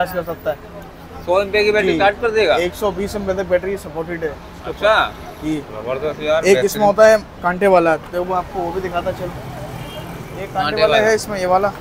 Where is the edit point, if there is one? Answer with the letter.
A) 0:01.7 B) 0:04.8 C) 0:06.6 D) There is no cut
D